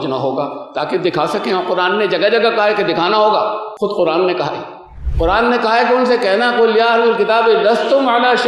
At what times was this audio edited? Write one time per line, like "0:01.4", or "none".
0:03.7